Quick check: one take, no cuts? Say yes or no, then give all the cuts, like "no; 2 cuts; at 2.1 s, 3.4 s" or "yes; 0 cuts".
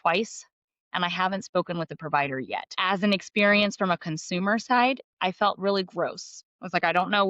no; 1 cut; at 2.7 s